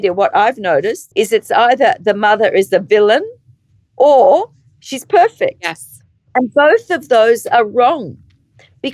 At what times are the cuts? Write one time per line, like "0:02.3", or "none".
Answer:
0:01.0